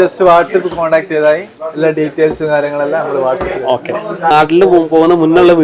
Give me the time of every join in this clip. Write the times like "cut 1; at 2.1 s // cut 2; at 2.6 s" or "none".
cut 1; at 4.3 s

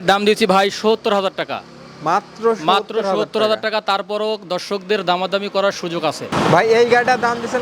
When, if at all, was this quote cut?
cut 1; at 6.2 s

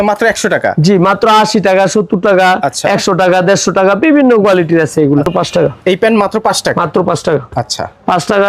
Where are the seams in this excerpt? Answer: cut 1; at 5.3 s

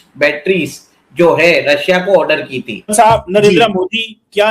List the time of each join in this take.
cut 1; at 2.8 s

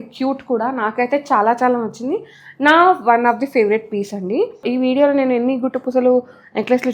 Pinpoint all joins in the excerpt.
cut 1; at 4.6 s

